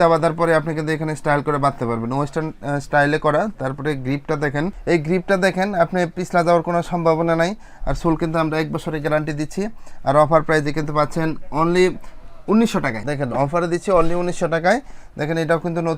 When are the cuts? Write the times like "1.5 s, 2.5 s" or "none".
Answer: none